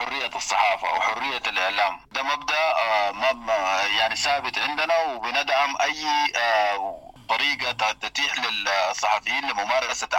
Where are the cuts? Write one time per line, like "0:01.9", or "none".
0:02.1
0:07.2